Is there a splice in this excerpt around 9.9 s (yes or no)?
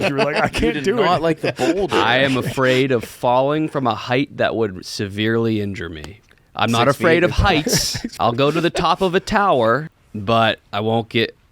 yes